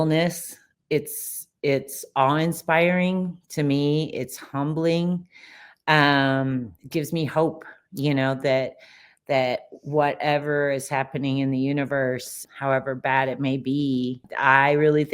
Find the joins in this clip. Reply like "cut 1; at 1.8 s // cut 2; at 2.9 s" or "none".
cut 1; at 12.4 s // cut 2; at 14.3 s